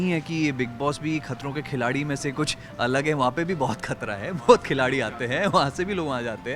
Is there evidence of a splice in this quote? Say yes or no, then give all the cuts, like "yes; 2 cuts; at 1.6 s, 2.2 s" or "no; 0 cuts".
no; 0 cuts